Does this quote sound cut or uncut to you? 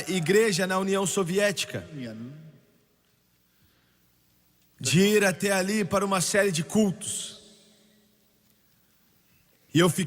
uncut